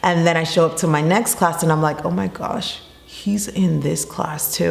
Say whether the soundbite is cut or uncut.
uncut